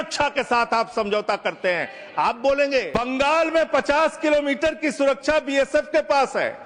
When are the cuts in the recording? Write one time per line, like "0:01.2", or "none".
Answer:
0:02.9